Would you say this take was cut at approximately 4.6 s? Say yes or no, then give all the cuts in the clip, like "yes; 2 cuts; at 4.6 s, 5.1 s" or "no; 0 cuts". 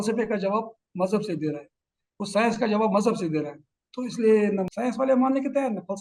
yes; 1 cut; at 4.6 s